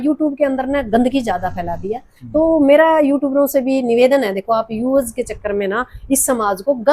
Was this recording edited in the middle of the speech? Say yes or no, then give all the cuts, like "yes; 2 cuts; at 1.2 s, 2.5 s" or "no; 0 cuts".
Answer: no; 0 cuts